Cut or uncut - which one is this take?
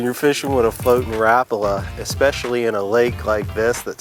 uncut